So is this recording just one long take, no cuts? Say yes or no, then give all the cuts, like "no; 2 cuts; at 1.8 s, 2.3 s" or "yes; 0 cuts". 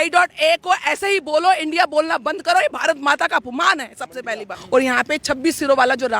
no; 1 cut; at 4.6 s